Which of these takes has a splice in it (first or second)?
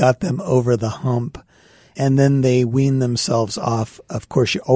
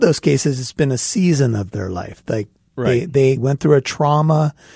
first